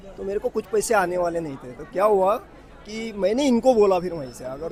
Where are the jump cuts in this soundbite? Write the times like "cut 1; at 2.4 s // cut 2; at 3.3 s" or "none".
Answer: none